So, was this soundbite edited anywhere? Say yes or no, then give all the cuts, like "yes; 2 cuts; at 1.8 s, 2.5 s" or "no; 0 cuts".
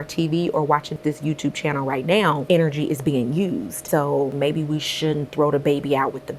yes; 3 cuts; at 1.0 s, 2.4 s, 4.2 s